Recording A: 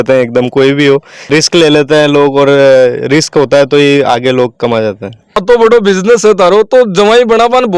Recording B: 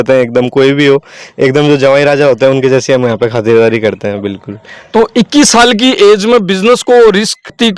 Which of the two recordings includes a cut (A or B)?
A